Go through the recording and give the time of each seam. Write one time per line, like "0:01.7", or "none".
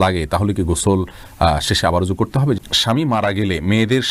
0:02.6